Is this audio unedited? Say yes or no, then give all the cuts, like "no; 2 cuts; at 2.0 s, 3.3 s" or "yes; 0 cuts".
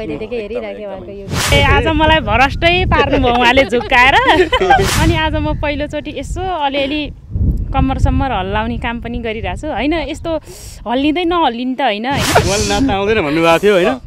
no; 3 cuts; at 1.5 s, 4.9 s, 12.2 s